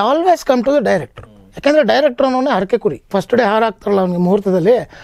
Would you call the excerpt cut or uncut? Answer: cut